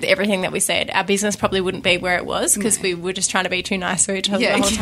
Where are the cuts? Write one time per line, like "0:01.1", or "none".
none